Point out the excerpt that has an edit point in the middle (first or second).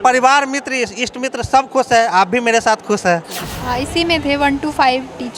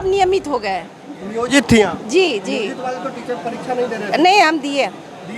first